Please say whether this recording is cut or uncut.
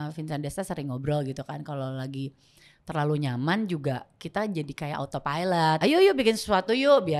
cut